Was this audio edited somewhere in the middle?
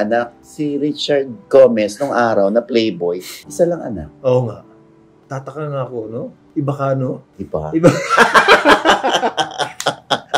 no; 0 cuts

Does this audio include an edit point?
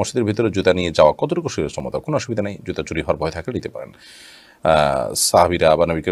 no; 0 cuts

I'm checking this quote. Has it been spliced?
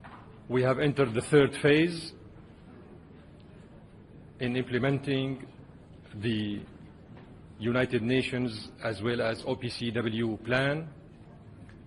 yes; 1 cut; at 7.9 s

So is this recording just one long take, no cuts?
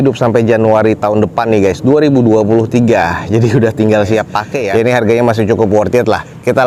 no; 1 cut; at 4.6 s

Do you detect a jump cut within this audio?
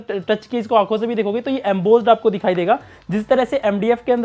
no; 0 cuts

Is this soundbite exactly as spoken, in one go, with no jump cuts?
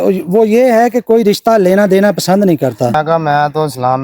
no; 1 cut; at 2.9 s

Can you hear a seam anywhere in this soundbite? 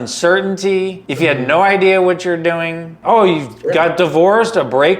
yes; 2 cuts; at 1.0 s, 3.0 s

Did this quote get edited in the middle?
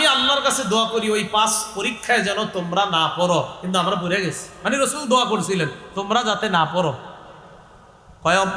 no; 0 cuts

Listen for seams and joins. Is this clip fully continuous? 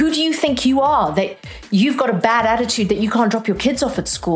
no; 1 cut; at 1.6 s

